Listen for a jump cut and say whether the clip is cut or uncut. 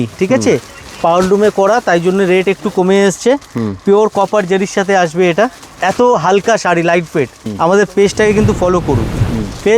cut